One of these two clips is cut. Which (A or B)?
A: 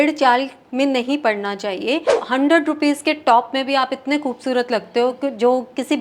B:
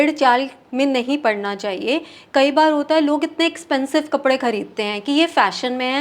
A